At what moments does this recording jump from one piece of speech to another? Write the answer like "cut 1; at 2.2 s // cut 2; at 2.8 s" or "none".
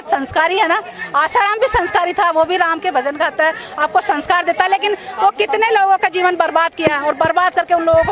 none